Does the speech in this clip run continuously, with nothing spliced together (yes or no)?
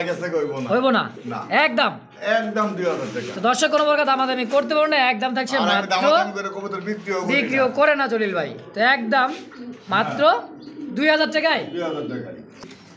yes